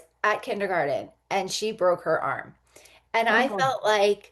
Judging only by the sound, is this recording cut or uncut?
uncut